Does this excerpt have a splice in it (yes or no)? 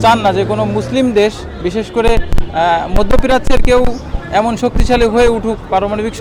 no